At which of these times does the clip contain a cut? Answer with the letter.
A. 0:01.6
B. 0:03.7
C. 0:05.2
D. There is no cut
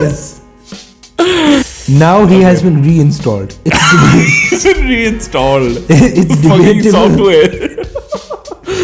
A